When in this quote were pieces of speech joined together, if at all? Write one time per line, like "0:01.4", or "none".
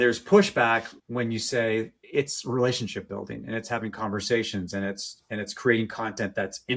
0:01.0
0:02.0